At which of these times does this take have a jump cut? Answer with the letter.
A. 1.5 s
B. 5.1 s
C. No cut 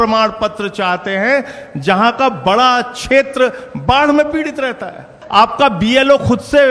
B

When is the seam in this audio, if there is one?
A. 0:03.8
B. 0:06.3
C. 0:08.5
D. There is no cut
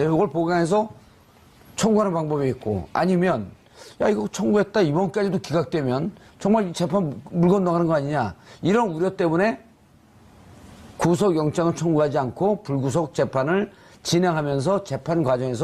C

